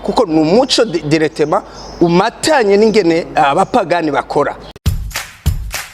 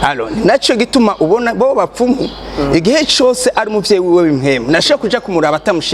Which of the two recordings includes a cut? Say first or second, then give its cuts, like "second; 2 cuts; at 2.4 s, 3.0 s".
first; 1 cut; at 4.7 s